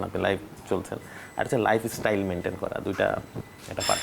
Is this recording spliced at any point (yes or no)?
no